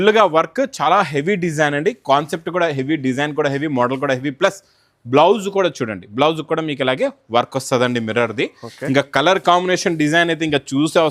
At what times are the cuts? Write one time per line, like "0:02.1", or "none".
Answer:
none